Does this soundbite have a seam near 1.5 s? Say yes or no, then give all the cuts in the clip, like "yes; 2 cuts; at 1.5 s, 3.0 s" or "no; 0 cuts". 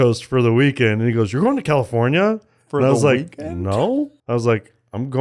no; 1 cut; at 4.2 s